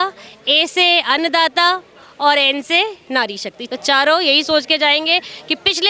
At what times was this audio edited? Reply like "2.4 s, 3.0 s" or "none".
3.6 s